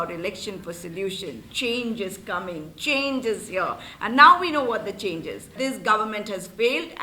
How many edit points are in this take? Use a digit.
1